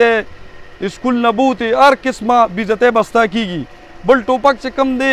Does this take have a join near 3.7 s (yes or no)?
no